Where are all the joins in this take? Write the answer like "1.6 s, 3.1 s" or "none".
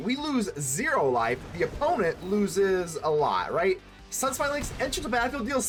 none